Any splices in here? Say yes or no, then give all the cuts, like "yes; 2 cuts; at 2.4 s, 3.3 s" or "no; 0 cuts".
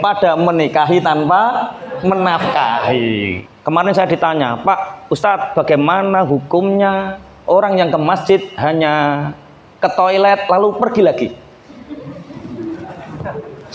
yes; 1 cut; at 3.5 s